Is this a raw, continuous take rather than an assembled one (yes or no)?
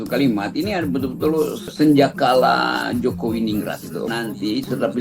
no